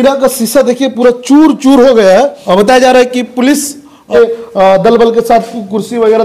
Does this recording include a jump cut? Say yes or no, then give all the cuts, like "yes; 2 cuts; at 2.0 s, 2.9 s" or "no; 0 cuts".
yes; 2 cuts; at 2.4 s, 4.1 s